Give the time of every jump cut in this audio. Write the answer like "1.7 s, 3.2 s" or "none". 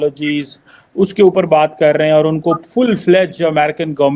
none

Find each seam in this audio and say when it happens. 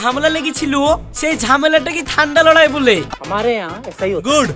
3.1 s

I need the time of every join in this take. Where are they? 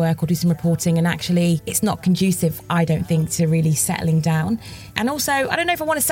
1.7 s, 4.9 s

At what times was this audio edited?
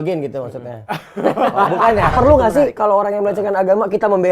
2.1 s

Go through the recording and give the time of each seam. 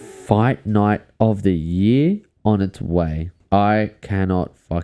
3.3 s

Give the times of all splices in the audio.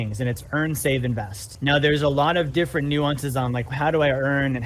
1.5 s, 3.7 s

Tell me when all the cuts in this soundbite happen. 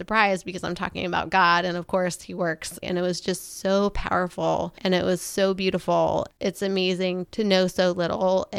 2.8 s, 4.7 s, 6.3 s

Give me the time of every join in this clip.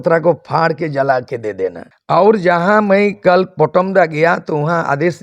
1.9 s

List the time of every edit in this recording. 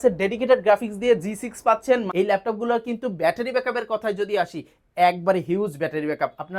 2.1 s

